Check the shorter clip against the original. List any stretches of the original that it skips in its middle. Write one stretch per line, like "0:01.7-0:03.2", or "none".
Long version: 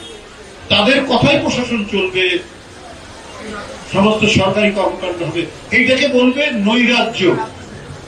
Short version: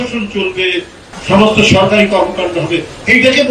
0:02.6-0:03.7

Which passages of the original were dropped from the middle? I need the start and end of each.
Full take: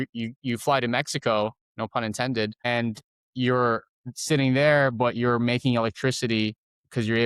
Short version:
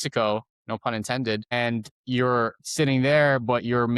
0:03.0-0:03.2
0:03.9-0:04.1

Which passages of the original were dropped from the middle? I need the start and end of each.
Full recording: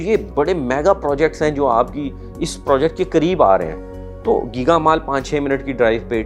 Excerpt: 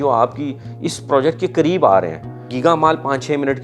0:04.1-0:04.5

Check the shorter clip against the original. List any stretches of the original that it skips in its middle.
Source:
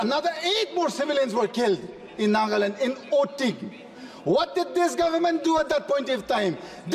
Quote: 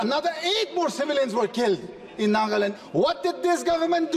0:02.7-0:04.1

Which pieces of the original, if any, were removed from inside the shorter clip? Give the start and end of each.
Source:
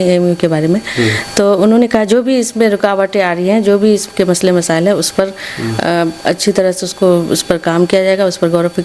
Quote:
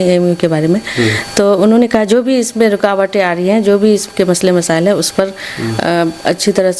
none

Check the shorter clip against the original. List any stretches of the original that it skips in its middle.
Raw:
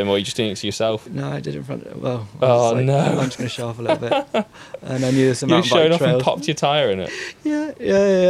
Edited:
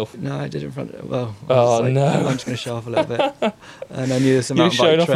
none

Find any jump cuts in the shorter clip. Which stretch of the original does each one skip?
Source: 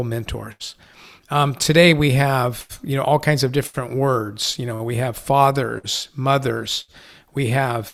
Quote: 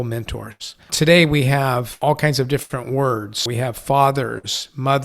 0:00.9-0:01.6
0:02.7-0:03.0
0:04.4-0:04.8

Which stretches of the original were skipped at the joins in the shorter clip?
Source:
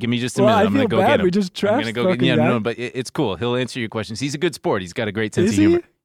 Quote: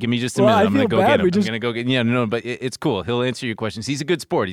0:01.5-0:01.9

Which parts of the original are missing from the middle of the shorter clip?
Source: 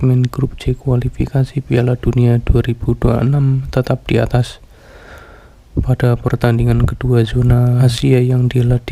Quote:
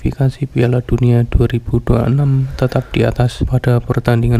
0:04.5-0:05.7

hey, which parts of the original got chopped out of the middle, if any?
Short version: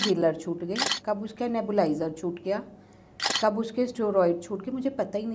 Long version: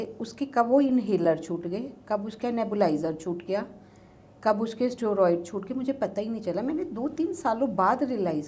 none

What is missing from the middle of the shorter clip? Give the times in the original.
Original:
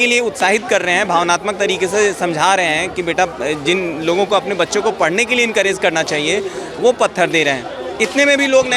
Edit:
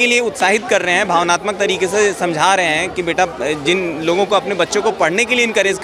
none

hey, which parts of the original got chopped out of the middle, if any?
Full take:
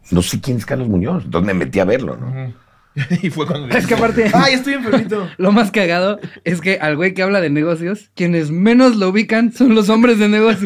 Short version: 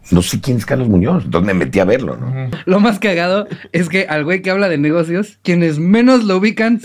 0:02.6-0:05.3

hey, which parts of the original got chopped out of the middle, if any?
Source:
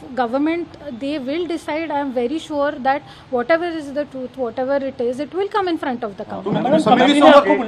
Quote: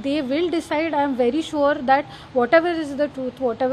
none

